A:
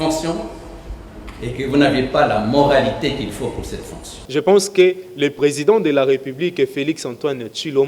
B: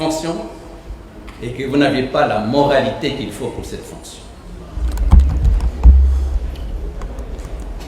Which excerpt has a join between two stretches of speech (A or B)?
A